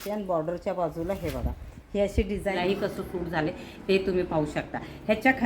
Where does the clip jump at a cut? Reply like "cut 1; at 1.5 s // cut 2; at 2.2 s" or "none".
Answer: cut 1; at 2.5 s